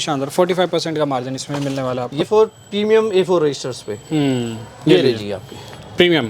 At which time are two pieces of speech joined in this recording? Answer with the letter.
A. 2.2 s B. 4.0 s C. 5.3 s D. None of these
A